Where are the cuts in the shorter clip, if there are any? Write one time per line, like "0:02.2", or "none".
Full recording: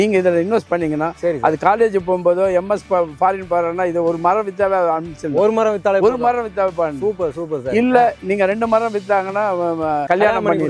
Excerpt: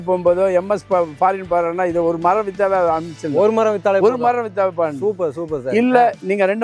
none